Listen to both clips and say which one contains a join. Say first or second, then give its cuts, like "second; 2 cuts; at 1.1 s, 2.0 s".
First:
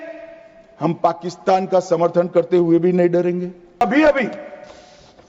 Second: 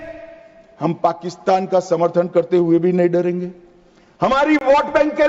first; 1 cut; at 3.8 s